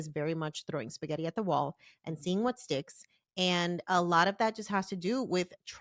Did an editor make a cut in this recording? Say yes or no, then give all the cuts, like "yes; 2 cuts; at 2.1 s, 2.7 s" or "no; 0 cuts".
no; 0 cuts